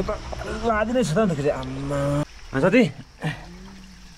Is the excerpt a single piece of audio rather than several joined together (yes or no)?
yes